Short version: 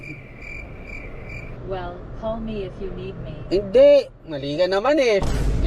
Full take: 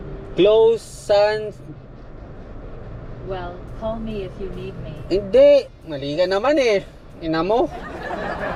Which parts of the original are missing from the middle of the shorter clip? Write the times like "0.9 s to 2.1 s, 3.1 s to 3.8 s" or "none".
none